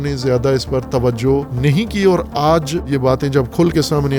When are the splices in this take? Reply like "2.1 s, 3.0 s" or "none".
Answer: 1.5 s, 2.9 s